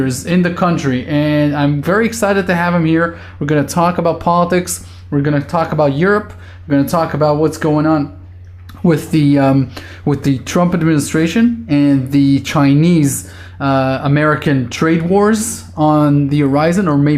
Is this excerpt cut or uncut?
cut